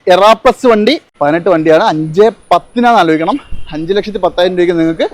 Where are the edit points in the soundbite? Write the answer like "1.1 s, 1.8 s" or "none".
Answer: 1.1 s